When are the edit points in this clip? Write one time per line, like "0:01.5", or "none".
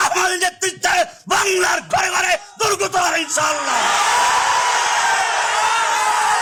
none